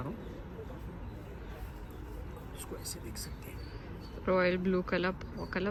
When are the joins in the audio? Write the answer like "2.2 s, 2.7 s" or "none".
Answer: none